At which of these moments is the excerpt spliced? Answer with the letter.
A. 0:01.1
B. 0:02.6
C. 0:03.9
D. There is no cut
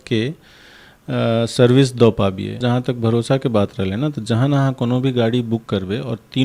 B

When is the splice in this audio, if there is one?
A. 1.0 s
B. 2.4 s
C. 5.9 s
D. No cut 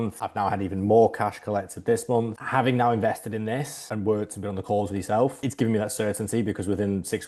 B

